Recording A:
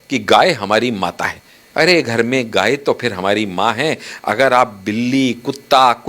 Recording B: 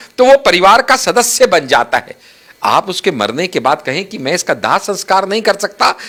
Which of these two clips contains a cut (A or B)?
A